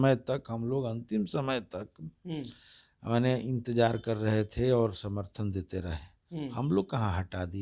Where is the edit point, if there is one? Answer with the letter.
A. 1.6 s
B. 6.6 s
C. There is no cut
C